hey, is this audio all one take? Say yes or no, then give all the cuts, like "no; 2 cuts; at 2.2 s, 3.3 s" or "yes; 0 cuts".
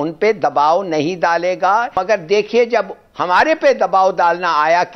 no; 1 cut; at 1.9 s